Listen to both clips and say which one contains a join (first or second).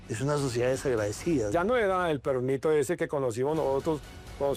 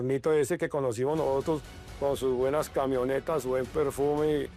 first